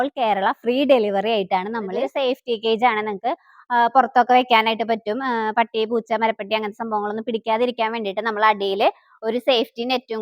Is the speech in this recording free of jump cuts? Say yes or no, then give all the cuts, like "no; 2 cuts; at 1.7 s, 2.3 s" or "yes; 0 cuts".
no; 1 cut; at 2.0 s